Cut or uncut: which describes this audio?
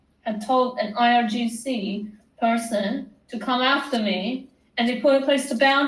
uncut